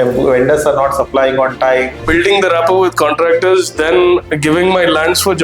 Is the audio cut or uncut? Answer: cut